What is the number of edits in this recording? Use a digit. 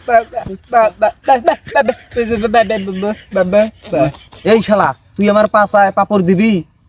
1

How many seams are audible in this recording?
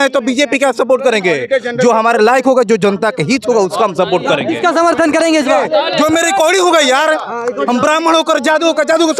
0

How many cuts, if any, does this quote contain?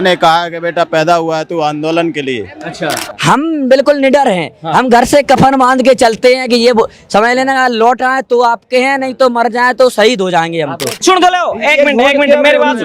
2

